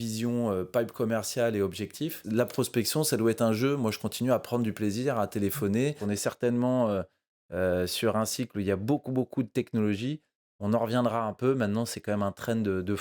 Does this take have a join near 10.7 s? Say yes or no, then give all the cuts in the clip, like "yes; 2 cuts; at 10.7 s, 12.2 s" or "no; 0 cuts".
no; 2 cuts; at 2.2 s, 6.0 s